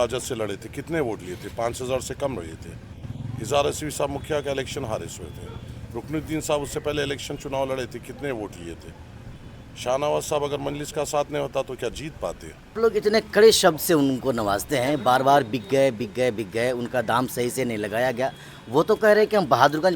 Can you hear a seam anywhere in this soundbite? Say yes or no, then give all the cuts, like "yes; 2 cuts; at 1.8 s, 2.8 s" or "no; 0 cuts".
yes; 1 cut; at 12.8 s